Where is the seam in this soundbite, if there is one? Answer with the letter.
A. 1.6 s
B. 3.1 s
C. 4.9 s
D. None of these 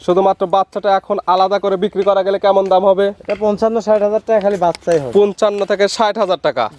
D